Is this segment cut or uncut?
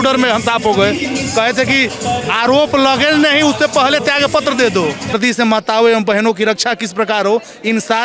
cut